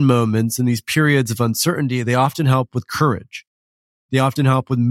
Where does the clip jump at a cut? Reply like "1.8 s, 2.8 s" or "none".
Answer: none